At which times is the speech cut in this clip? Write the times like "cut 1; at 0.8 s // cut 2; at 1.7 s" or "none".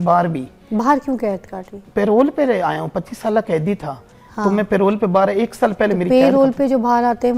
none